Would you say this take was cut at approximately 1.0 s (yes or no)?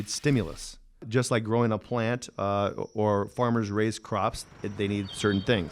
yes